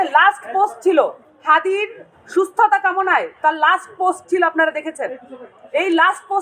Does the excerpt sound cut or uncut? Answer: cut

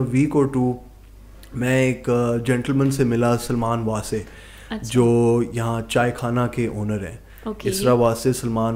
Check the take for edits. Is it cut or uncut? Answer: uncut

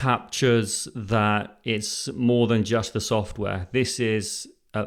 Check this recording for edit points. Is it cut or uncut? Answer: uncut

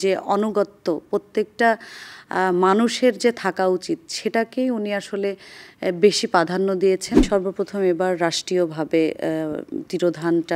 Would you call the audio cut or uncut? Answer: cut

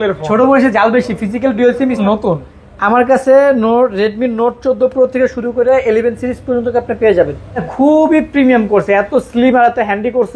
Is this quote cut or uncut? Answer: cut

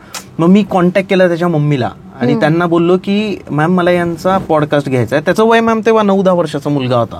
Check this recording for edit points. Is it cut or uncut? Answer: uncut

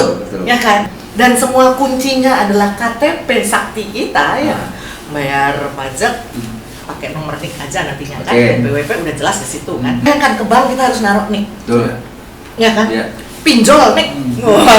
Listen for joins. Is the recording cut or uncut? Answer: cut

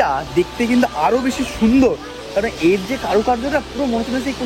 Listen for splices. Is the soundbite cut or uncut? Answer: uncut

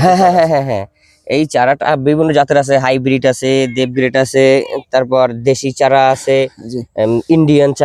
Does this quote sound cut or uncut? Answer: uncut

